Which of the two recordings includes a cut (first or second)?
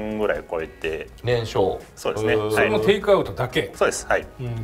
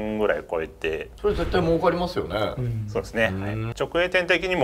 second